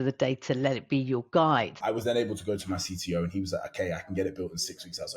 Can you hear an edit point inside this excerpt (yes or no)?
yes